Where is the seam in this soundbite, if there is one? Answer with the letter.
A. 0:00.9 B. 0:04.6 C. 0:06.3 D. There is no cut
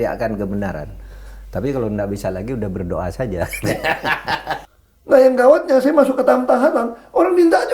B